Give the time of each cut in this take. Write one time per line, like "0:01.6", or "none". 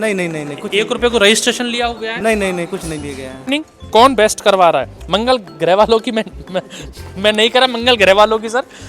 0:03.4